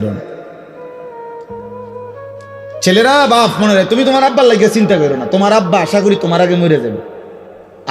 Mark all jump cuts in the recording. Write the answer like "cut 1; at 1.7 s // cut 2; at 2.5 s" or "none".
none